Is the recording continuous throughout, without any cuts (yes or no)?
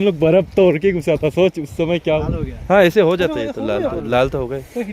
no